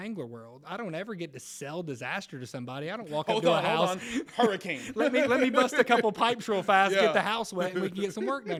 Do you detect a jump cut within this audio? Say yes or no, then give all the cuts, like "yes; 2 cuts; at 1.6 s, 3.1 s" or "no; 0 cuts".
no; 0 cuts